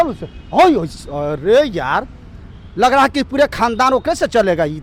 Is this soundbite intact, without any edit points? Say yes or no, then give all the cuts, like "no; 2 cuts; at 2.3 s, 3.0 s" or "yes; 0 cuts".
yes; 0 cuts